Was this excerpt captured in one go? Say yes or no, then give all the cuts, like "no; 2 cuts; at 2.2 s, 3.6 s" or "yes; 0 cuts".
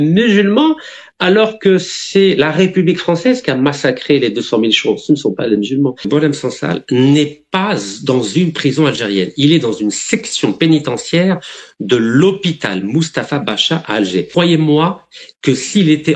no; 2 cuts; at 6.1 s, 14.3 s